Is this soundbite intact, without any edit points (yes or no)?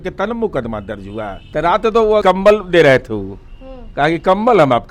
no